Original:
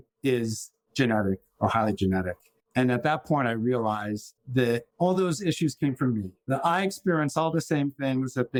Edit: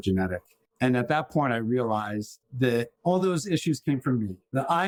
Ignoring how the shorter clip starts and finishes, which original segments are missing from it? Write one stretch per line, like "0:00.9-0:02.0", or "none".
none